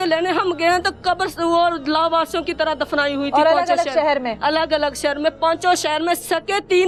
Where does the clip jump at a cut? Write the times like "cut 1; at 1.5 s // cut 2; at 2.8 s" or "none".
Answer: none